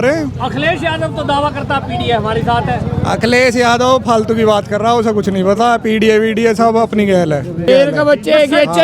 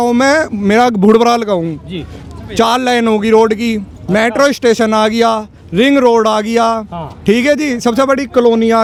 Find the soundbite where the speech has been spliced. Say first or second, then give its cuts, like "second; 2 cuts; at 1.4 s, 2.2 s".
first; 1 cut; at 7.7 s